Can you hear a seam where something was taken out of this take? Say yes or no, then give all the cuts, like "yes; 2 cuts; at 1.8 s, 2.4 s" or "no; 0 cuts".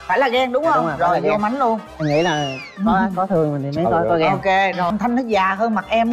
yes; 1 cut; at 4.9 s